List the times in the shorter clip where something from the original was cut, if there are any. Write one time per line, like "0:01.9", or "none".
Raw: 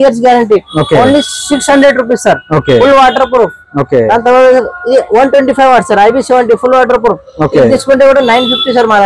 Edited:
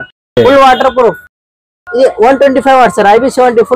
0:01.7